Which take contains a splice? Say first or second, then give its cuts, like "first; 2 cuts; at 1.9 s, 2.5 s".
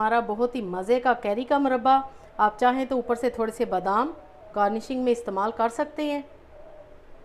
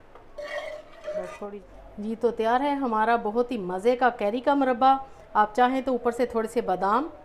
second; 1 cut; at 1.8 s